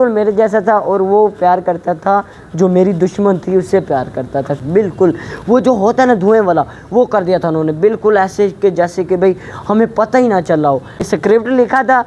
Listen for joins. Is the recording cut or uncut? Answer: cut